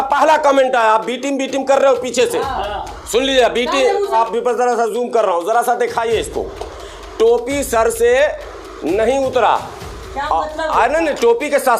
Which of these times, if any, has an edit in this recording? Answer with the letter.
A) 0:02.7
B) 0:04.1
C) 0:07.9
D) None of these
B